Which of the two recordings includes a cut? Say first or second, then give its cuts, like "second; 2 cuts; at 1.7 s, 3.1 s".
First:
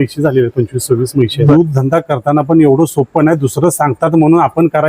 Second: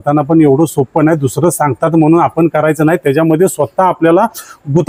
first; 1 cut; at 1.2 s